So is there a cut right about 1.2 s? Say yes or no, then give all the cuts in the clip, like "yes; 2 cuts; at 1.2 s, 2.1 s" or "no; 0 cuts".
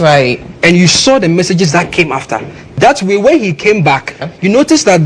no; 2 cuts; at 2.6 s, 4.2 s